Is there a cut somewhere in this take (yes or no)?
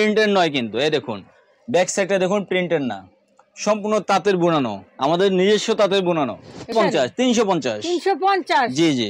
yes